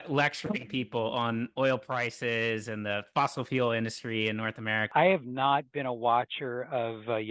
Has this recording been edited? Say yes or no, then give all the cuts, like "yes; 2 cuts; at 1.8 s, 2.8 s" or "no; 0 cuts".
yes; 1 cut; at 4.9 s